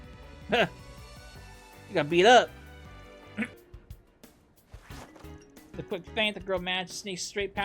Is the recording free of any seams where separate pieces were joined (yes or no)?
no